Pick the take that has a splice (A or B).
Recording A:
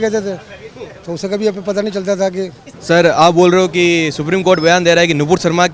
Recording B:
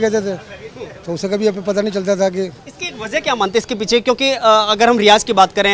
A